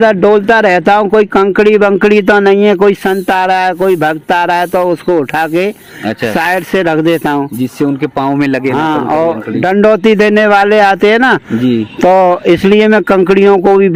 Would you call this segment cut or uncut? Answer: uncut